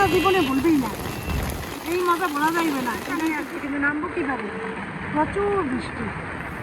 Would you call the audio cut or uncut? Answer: cut